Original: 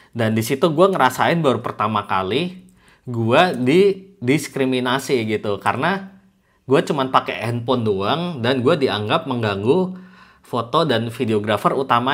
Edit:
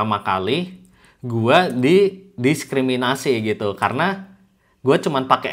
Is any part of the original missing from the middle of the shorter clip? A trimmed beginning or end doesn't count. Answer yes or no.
no